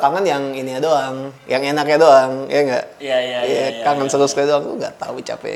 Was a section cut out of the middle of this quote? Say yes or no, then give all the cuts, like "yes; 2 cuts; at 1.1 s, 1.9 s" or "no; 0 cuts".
no; 0 cuts